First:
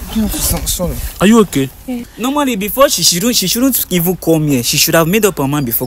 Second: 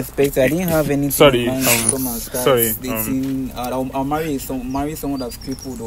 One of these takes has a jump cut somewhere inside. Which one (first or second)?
first